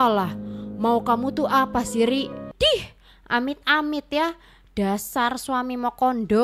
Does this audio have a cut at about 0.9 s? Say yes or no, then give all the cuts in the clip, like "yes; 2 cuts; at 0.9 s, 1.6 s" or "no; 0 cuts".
no; 1 cut; at 2.5 s